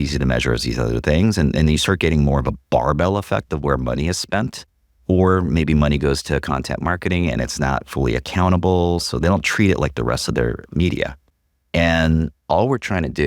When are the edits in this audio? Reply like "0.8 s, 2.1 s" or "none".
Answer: none